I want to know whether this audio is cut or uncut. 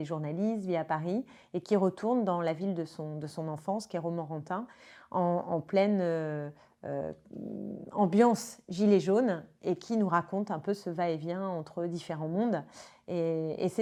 uncut